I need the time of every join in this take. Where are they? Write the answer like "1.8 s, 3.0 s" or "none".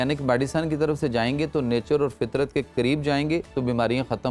none